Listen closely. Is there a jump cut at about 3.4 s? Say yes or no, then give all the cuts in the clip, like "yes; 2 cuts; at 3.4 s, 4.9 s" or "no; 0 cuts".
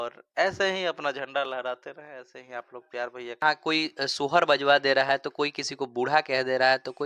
yes; 1 cut; at 3.4 s